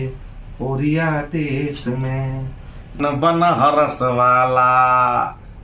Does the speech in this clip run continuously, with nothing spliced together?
no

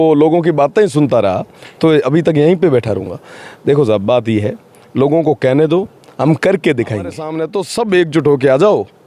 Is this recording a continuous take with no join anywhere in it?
no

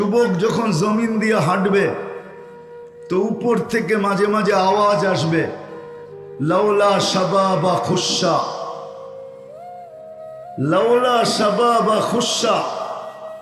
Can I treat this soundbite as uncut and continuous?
no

